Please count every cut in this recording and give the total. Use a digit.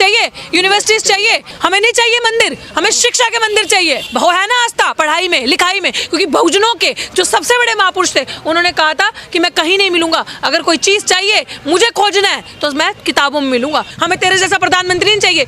3